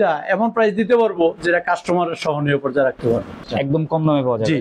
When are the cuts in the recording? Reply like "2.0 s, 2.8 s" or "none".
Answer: 3.4 s